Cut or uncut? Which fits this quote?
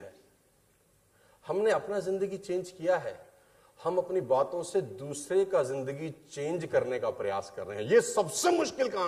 uncut